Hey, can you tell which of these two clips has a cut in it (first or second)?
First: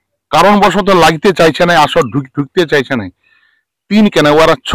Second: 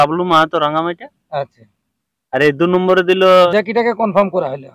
second